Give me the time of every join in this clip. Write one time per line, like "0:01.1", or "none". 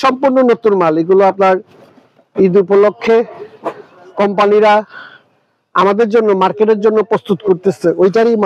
none